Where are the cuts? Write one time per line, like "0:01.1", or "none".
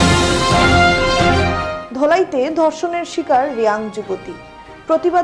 0:01.4